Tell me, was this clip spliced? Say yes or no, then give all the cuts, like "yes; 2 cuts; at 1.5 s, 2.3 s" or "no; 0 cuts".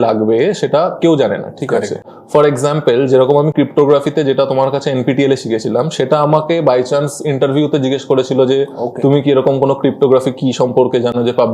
no; 0 cuts